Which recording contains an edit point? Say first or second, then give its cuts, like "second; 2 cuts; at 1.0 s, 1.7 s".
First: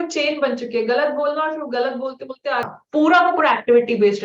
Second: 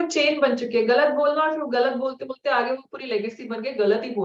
first; 1 cut; at 2.7 s